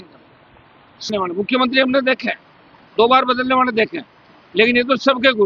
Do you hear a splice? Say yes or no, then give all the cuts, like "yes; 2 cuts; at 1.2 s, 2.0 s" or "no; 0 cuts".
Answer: yes; 1 cut; at 1.1 s